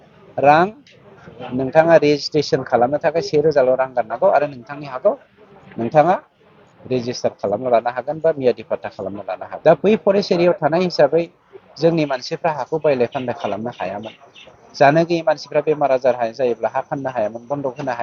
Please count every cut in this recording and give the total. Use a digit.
1